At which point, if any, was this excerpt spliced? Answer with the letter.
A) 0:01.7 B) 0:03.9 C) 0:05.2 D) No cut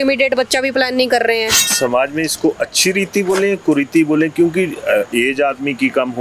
A